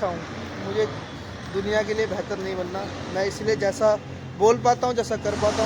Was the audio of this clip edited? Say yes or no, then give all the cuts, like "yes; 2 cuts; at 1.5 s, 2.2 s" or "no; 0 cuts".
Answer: no; 0 cuts